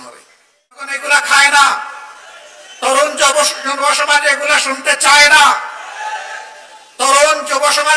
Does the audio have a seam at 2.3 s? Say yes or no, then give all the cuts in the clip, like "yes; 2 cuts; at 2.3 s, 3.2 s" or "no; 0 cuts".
no; 1 cut; at 0.9 s